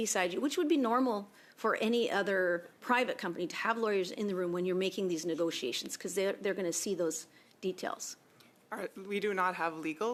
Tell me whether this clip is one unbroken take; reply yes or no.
yes